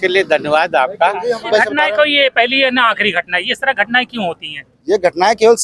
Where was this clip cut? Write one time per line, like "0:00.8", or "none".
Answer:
0:01.5